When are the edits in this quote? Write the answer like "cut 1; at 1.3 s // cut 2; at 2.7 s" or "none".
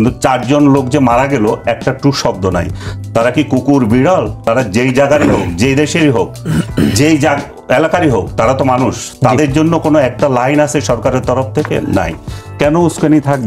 cut 1; at 12.5 s

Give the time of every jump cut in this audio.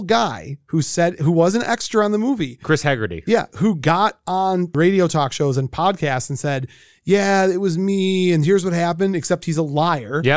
cut 1; at 4.7 s

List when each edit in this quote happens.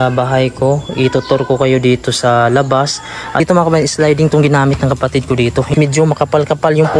cut 1; at 3.4 s // cut 2; at 5.7 s

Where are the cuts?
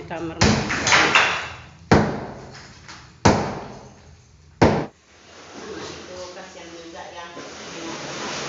cut 1; at 4.9 s

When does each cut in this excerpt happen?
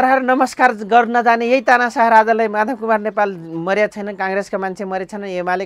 none

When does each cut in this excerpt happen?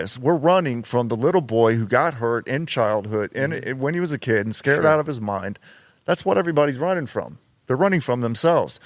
none

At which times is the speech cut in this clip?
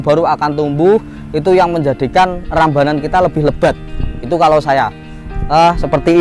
none

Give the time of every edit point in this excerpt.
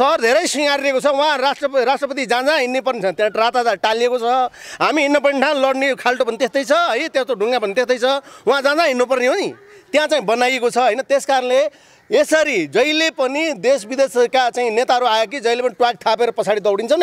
none

